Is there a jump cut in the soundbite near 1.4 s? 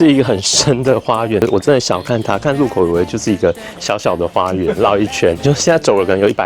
yes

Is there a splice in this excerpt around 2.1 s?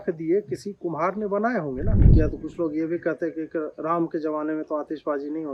yes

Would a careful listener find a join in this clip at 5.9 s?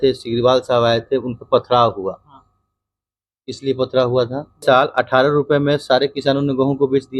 no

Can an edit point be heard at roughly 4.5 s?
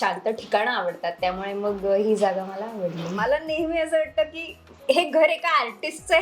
no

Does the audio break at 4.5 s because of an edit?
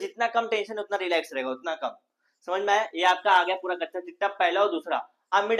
no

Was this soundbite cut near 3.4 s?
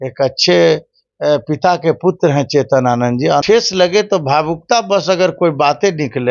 yes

